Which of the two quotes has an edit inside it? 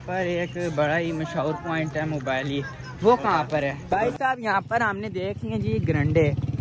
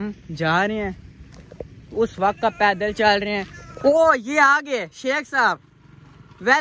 first; 1 cut; at 3.8 s

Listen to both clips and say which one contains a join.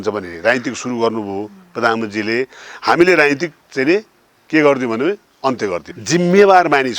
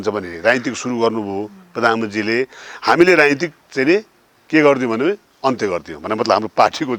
first; 1 cut; at 5.9 s

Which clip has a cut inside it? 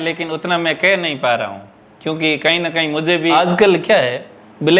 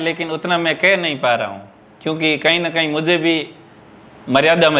first; 1 cut; at 3.3 s

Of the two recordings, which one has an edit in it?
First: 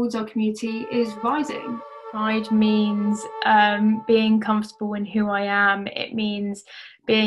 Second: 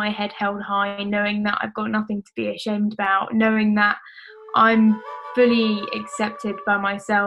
first; 1 cut; at 2.0 s

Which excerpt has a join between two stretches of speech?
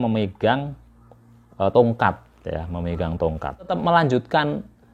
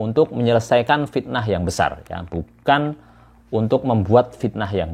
first; 1 cut; at 3.7 s

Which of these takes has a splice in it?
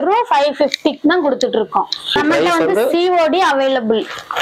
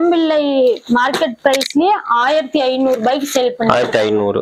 first; 1 cut; at 2.2 s

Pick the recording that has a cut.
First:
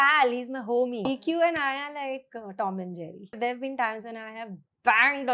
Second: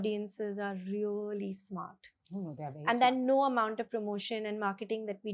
first; 2 cuts; at 1.1 s, 3.4 s

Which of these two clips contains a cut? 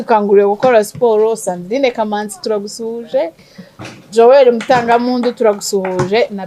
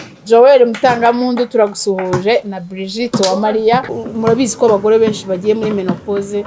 second; 1 cut; at 4.0 s

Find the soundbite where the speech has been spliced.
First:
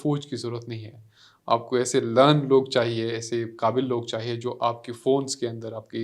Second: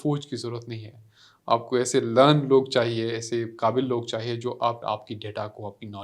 second; 1 cut; at 4.8 s

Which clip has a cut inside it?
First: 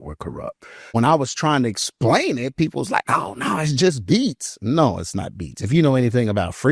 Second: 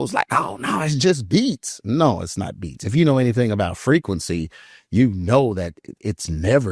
first; 1 cut; at 0.9 s

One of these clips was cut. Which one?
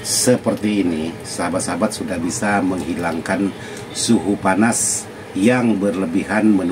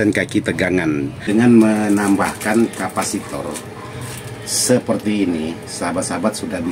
second; 1 cut; at 1.3 s

